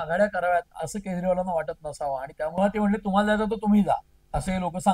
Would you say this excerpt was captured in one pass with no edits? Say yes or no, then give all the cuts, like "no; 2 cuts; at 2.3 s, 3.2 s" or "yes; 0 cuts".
no; 1 cut; at 2.6 s